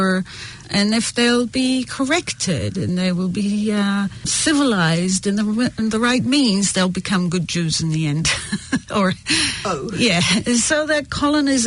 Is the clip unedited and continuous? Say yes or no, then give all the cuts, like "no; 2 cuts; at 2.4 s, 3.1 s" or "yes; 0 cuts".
yes; 0 cuts